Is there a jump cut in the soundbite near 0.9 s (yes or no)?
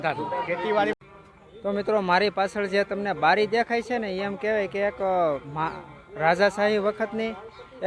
yes